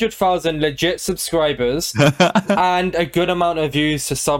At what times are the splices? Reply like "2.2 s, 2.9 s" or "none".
none

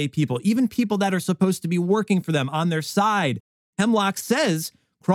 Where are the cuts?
none

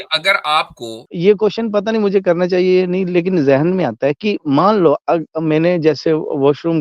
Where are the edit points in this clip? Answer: 1.0 s

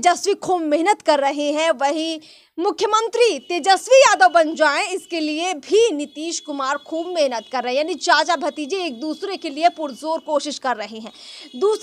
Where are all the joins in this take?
none

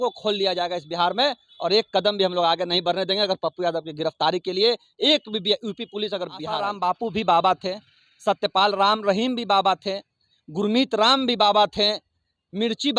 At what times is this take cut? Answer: 6.6 s

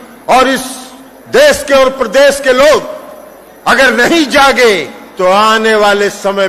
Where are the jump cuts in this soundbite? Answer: none

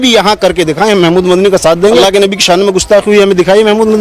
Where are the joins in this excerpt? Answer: 2.0 s

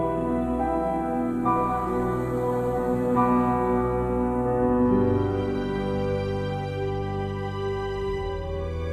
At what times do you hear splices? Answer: none

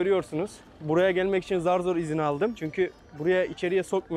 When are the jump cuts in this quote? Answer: 2.6 s

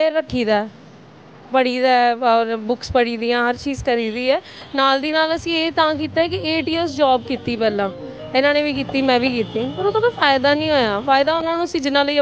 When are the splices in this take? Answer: none

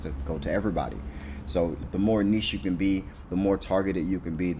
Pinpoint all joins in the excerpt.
1.9 s

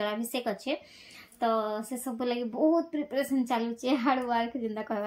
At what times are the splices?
none

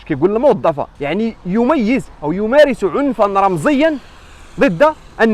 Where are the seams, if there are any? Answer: 0.9 s

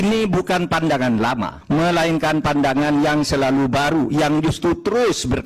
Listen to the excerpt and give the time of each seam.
1.5 s

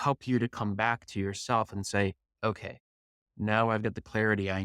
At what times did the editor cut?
none

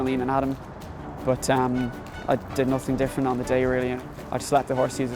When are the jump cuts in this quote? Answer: 2.1 s, 4.0 s

